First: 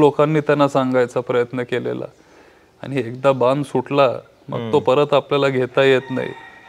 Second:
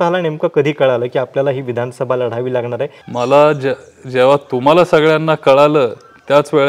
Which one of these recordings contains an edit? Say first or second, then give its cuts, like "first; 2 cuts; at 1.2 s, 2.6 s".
second; 1 cut; at 3.0 s